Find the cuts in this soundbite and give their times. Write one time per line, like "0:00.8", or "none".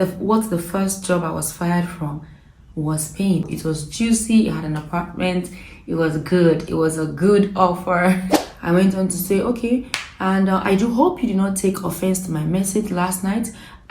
0:03.5
0:08.4